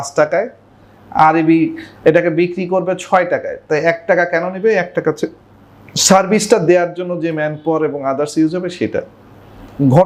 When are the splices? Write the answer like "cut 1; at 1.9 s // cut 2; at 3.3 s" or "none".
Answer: none

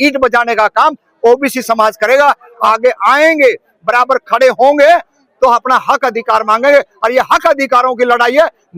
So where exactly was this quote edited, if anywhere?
cut 1; at 2.6 s

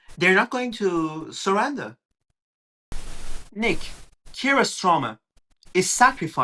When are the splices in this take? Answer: cut 1; at 2.7 s

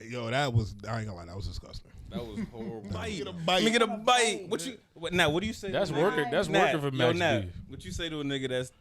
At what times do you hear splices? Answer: cut 1; at 3.3 s

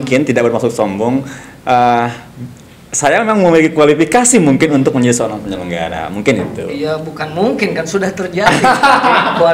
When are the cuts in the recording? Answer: none

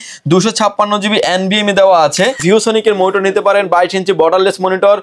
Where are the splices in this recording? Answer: cut 1; at 2.4 s

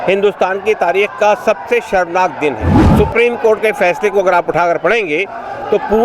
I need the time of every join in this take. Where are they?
cut 1; at 2.8 s

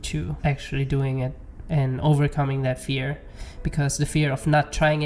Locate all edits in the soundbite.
none

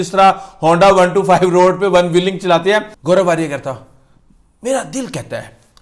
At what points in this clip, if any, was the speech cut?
cut 1; at 2.9 s

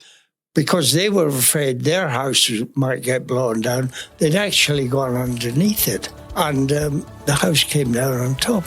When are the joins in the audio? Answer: cut 1; at 6.2 s // cut 2; at 7.1 s

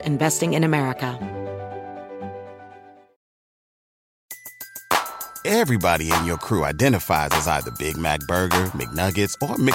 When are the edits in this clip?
cut 1; at 1.1 s

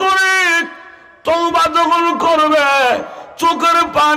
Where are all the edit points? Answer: none

